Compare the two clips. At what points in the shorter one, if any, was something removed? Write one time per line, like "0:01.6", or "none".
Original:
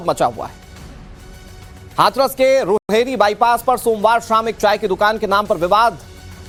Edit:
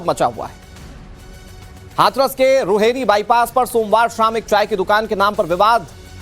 0:02.8